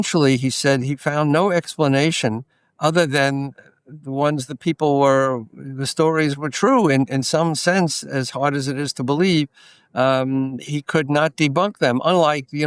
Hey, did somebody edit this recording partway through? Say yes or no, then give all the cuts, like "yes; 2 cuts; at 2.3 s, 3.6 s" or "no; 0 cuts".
no; 0 cuts